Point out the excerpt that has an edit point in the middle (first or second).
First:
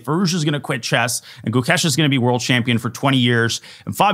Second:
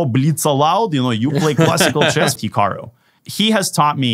second